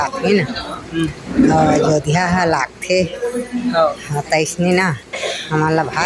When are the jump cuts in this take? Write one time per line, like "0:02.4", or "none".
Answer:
none